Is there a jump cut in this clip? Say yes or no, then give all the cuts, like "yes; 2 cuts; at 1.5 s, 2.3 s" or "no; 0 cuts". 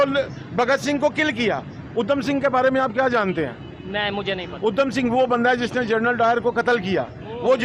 no; 0 cuts